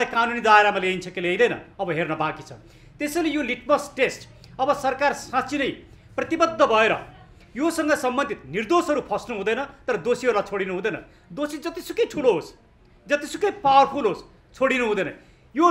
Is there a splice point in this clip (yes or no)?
no